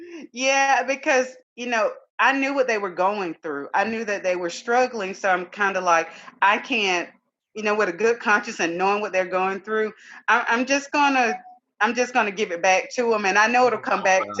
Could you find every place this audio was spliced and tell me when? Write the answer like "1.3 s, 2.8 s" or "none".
1.4 s